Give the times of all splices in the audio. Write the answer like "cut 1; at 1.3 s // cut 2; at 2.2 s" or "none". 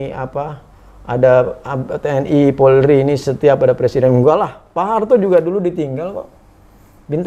none